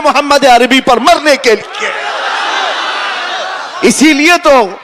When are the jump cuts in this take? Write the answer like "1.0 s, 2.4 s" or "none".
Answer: none